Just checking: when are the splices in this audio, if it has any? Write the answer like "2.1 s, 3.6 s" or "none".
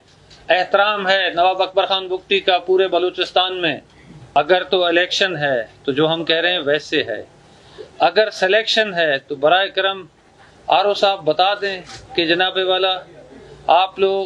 4.4 s